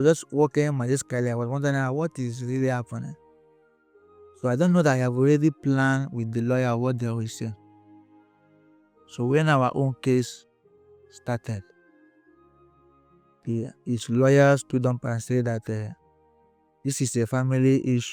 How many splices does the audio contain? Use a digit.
0